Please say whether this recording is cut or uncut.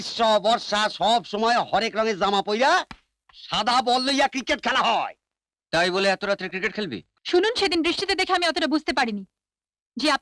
cut